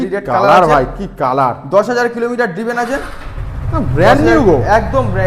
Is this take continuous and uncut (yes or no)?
yes